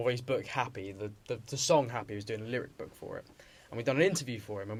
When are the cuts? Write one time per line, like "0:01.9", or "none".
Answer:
none